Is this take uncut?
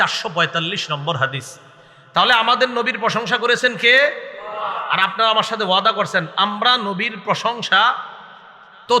yes; 0 cuts

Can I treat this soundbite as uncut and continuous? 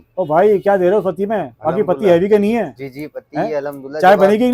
yes; 0 cuts

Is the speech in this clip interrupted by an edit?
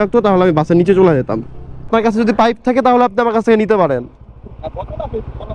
yes; 1 cut; at 1.9 s

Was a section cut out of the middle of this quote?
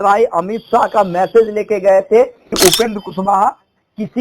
yes; 1 cut; at 2.4 s

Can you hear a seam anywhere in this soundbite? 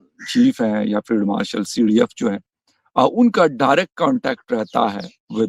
no; 0 cuts

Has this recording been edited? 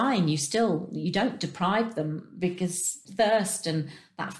yes; 1 cut; at 3.0 s

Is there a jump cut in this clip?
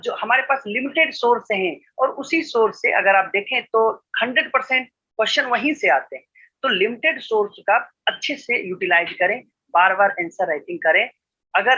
no; 0 cuts

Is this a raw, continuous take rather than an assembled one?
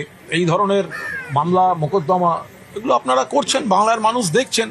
no; 1 cut; at 1.4 s

